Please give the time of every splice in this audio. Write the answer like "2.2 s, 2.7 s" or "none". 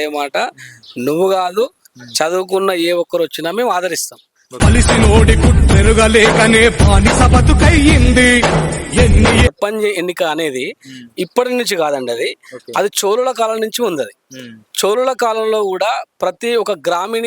9.5 s